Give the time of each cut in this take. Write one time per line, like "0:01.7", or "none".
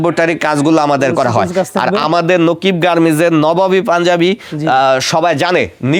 none

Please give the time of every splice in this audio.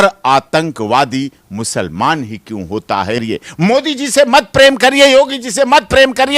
0:03.2

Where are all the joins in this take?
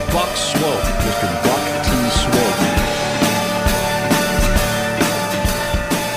none

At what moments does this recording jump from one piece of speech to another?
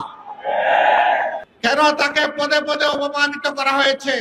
0:01.5

